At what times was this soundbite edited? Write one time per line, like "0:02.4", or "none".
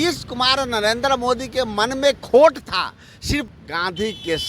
0:03.5